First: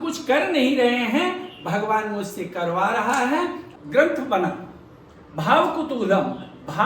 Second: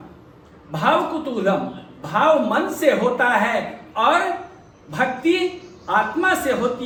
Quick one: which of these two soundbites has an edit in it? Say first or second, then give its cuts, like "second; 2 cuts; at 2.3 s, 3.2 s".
first; 1 cut; at 3.6 s